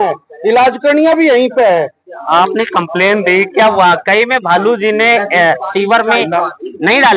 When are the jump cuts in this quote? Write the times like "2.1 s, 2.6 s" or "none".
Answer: 2.3 s

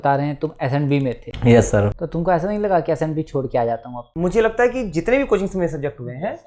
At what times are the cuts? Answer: 4.1 s

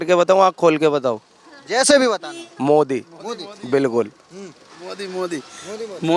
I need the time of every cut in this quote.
none

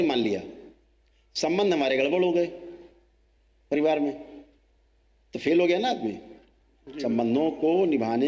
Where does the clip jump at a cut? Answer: none

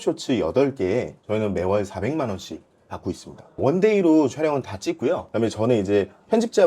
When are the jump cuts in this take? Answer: 3.6 s, 5.3 s

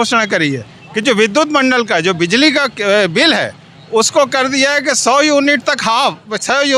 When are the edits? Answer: none

